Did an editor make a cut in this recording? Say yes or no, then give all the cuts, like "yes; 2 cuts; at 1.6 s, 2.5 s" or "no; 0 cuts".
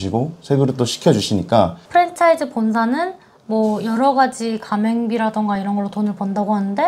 yes; 1 cut; at 1.8 s